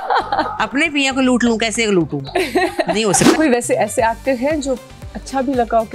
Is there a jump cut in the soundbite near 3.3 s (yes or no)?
yes